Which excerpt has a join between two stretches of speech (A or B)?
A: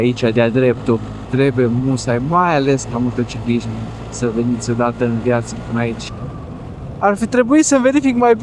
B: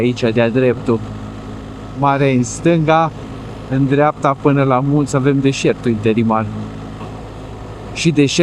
A